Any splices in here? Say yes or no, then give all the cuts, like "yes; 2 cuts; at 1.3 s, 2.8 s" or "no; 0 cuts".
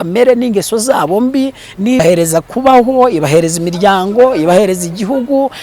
yes; 1 cut; at 2.0 s